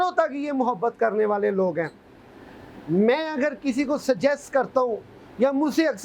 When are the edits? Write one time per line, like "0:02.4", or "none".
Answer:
none